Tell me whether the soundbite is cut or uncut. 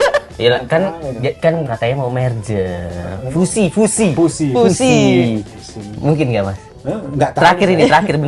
uncut